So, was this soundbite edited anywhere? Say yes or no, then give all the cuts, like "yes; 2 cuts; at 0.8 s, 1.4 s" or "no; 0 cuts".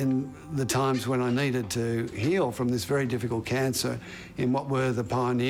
no; 0 cuts